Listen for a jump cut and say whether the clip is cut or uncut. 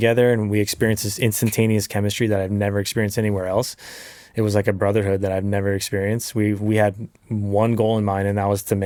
uncut